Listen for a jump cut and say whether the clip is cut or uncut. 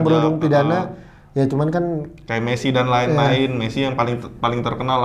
uncut